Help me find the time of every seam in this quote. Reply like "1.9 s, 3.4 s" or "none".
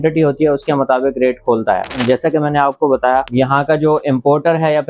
1.9 s, 3.3 s